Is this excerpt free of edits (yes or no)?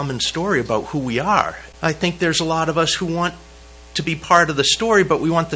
no